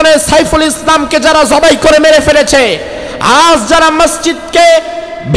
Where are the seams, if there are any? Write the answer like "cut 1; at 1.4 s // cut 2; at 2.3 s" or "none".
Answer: none